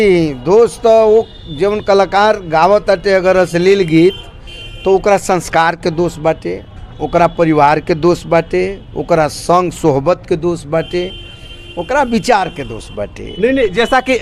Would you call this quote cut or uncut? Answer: uncut